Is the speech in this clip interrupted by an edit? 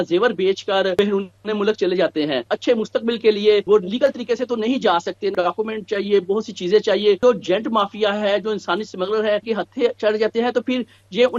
yes; 6 cuts; at 0.9 s, 2.5 s, 3.6 s, 5.3 s, 7.2 s, 9.4 s

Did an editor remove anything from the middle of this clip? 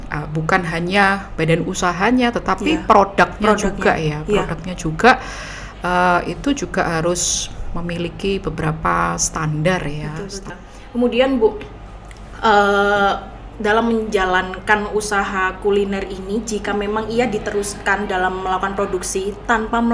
yes; 1 cut; at 10.5 s

